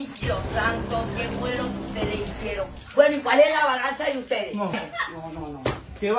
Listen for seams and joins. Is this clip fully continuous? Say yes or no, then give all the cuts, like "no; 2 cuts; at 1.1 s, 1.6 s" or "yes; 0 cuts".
no; 1 cut; at 4.8 s